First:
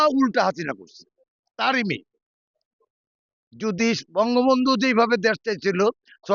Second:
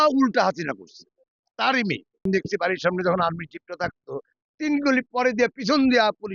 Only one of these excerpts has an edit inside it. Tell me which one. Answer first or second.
second